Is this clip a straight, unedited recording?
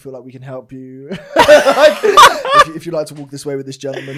yes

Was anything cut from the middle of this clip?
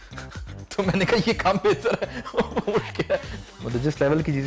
yes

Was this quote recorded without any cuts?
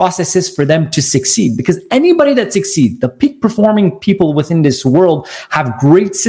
yes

